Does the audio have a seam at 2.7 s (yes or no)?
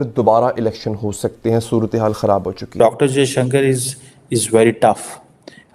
yes